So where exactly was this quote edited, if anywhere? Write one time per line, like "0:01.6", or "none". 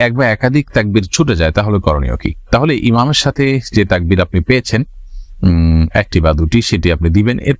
none